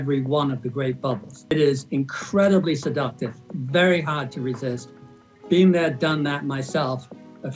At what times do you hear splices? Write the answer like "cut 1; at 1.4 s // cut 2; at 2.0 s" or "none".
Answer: cut 1; at 1.5 s